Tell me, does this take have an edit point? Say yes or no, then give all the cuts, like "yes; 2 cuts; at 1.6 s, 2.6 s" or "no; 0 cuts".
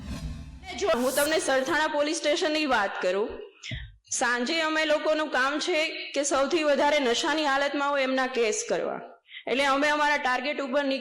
yes; 1 cut; at 1.0 s